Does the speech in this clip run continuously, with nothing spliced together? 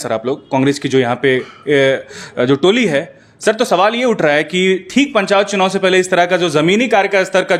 yes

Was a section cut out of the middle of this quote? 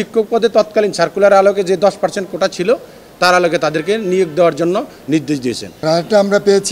yes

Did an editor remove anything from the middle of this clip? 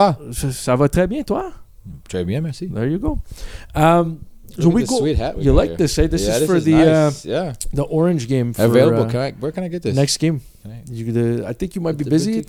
no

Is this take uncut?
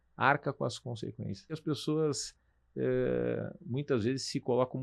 no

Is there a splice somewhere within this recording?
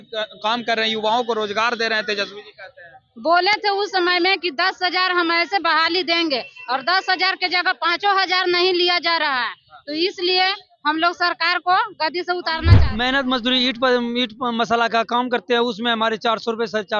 yes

